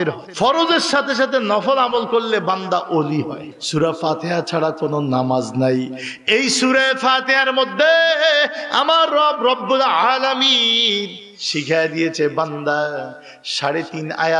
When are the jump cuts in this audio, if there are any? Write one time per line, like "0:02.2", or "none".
0:03.4